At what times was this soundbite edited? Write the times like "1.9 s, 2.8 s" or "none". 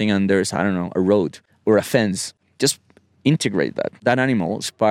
1.4 s, 2.3 s, 3.9 s